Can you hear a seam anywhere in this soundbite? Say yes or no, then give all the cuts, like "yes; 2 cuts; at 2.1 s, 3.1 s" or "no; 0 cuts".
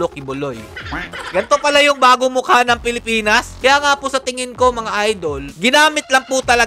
yes; 2 cuts; at 1.1 s, 3.5 s